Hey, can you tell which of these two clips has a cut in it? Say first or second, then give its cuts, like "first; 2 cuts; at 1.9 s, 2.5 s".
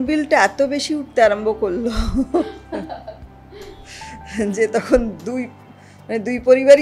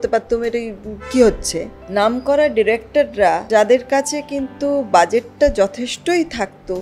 second; 2 cuts; at 1.7 s, 3.4 s